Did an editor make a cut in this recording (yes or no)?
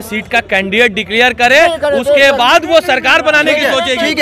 no